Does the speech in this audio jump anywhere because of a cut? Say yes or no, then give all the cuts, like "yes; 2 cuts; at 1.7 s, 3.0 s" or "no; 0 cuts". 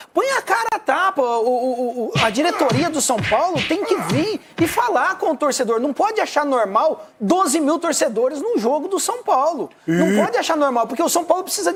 no; 0 cuts